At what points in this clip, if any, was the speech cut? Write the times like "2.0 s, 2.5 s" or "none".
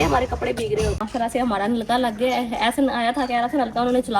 1.1 s

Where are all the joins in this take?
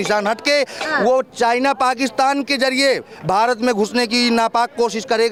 none

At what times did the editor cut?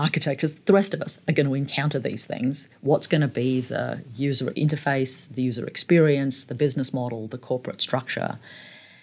4.5 s

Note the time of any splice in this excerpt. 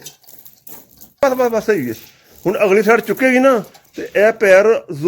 1.2 s

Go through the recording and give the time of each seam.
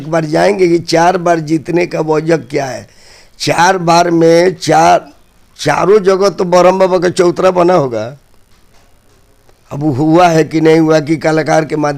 none

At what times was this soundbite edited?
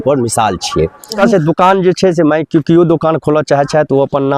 1.2 s

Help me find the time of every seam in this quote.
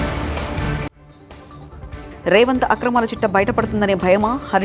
2.1 s

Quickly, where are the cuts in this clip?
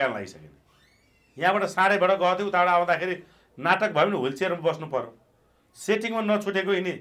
none

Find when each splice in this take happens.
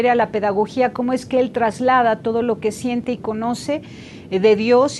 none

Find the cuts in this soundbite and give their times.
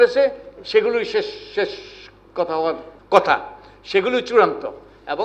2.9 s

